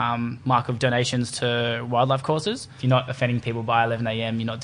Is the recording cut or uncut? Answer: cut